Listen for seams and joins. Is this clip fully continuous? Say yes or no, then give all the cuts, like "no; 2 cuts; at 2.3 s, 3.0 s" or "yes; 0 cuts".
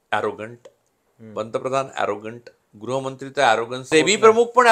no; 1 cut; at 3.8 s